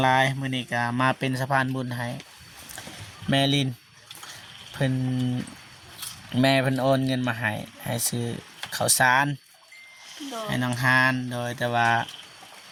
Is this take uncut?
yes; 0 cuts

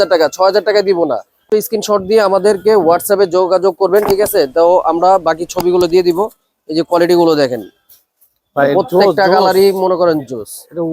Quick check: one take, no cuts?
no; 1 cut; at 1.4 s

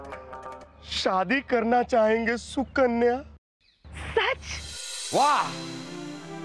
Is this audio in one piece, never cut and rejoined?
no; 1 cut; at 4.5 s

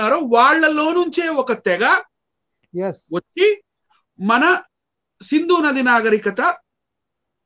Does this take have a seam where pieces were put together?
no; 0 cuts

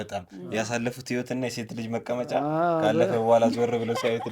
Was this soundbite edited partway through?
no; 0 cuts

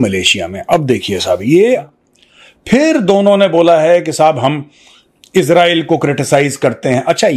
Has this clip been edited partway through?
yes; 1 cut; at 1.8 s

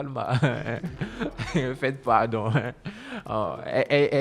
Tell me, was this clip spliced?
no; 0 cuts

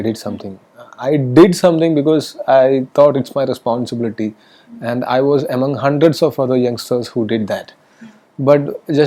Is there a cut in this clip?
no; 0 cuts

